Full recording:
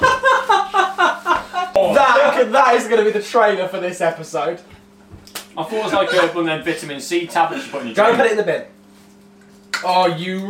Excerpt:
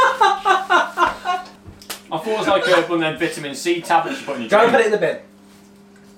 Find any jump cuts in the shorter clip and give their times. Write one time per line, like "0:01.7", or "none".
0:01.4